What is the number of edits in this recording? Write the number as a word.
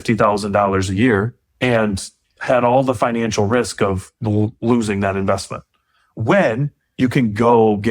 one